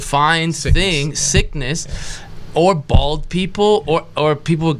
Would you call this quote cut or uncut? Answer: uncut